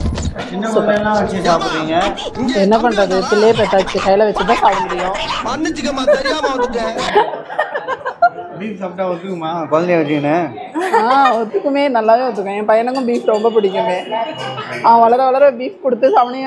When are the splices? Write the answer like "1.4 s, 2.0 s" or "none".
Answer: none